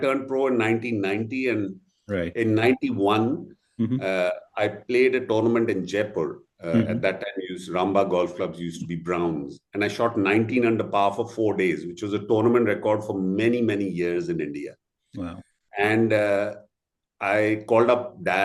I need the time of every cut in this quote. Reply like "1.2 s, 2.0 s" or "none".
none